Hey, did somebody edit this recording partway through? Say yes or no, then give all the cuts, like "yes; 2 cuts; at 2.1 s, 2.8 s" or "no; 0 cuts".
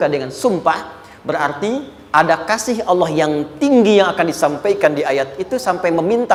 no; 0 cuts